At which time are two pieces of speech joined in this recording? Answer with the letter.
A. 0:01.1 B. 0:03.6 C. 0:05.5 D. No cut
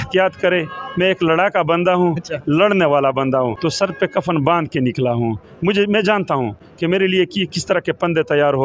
B